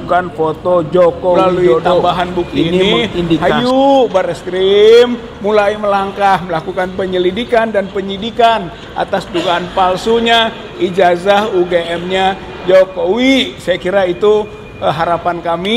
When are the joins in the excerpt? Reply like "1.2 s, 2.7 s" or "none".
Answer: 3.4 s